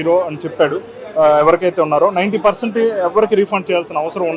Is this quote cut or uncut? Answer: uncut